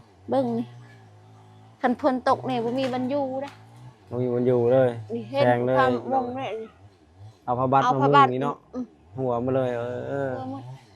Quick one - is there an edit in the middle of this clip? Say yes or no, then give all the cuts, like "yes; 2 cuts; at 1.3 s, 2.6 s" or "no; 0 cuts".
no; 0 cuts